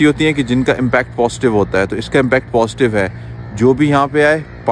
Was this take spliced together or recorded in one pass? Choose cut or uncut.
uncut